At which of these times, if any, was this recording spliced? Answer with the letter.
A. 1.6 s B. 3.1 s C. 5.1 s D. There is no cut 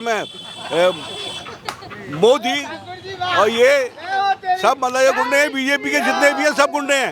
D